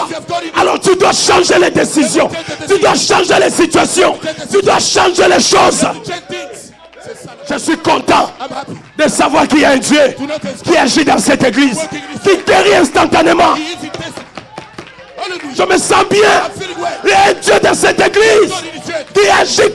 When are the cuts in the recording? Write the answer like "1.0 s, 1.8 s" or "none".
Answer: 7.3 s